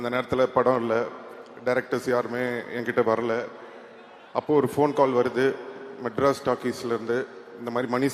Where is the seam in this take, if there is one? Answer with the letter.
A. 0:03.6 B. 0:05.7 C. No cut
C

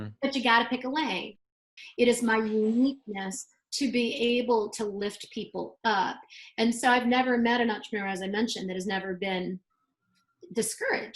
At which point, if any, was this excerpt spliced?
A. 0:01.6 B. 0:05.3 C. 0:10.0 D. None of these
A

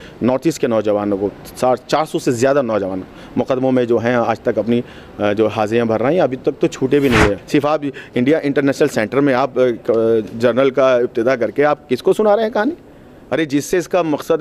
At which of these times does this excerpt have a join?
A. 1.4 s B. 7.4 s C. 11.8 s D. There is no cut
B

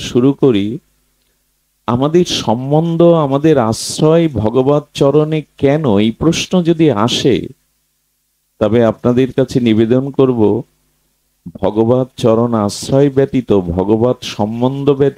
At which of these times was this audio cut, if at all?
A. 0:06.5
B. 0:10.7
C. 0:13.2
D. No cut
D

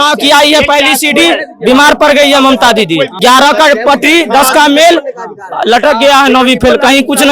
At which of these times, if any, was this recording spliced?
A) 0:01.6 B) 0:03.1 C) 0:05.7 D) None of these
B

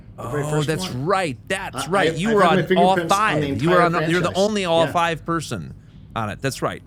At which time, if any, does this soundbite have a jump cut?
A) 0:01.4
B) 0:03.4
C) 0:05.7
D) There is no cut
D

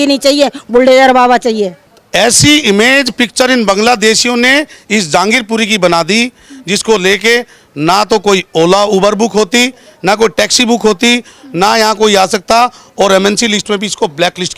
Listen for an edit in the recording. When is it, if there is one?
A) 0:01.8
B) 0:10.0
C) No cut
A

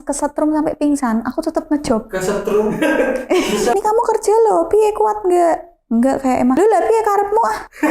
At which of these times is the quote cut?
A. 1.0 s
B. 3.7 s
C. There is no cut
B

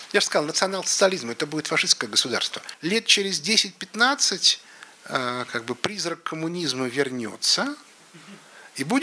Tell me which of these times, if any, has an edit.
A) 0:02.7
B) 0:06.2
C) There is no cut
A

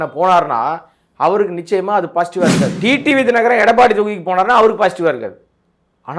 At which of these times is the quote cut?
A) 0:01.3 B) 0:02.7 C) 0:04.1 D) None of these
B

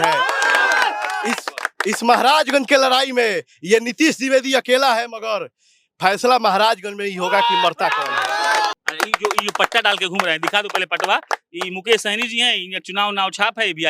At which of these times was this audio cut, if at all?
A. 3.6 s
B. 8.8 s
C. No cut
B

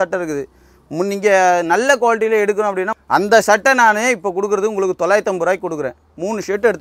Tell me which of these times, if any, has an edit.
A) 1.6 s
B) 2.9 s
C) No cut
B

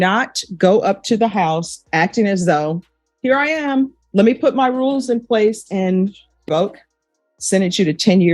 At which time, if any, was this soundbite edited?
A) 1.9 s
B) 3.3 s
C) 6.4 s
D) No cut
C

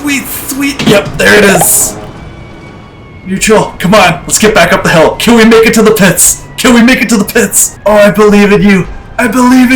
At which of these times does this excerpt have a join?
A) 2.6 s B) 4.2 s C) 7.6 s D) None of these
C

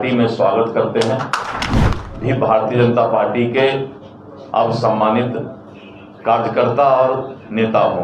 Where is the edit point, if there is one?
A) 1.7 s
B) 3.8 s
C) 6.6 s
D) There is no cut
A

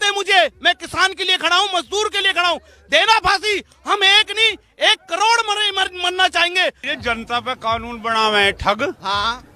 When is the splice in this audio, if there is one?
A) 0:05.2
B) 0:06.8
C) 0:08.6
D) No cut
B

